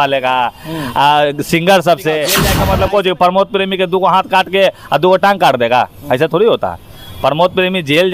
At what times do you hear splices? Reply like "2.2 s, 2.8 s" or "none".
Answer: 2.5 s